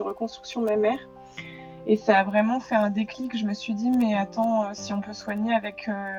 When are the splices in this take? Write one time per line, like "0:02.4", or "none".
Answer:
none